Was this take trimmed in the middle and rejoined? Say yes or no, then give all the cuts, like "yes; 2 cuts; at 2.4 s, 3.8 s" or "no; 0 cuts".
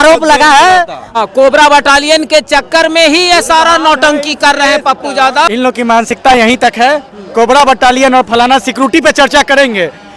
yes; 2 cuts; at 1.1 s, 5.5 s